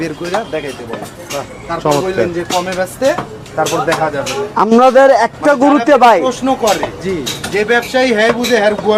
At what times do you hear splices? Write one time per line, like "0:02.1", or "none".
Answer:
none

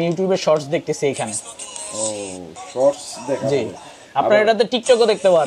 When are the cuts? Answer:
none

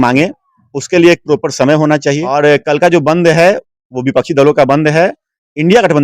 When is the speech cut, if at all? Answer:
0:02.2

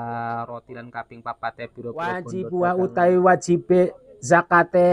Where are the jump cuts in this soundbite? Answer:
0:02.2

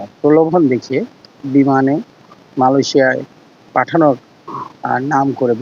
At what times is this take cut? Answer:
none

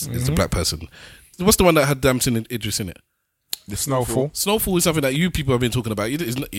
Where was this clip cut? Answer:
0:01.3

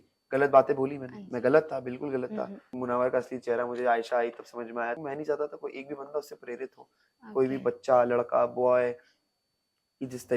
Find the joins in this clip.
0:02.7
0:05.0

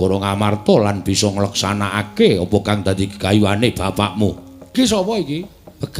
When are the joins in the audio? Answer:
0:04.7

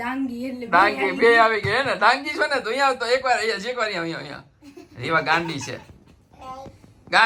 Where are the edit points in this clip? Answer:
none

